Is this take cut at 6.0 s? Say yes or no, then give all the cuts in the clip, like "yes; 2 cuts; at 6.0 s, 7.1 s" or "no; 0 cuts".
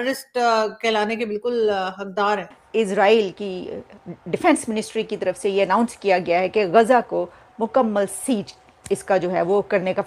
no; 1 cut; at 2.7 s